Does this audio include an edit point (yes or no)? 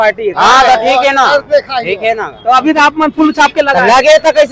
no